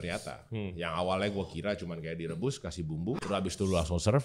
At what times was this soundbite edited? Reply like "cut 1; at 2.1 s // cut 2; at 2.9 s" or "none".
cut 1; at 3.2 s

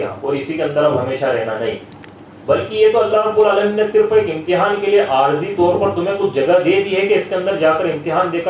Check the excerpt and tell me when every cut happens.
none

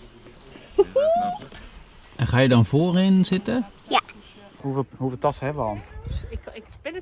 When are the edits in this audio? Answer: cut 1; at 4.6 s

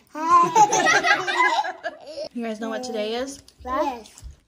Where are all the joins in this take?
cut 1; at 2.3 s

